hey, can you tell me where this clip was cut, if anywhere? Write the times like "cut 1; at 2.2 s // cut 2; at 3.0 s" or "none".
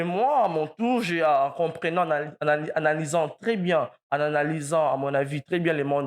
none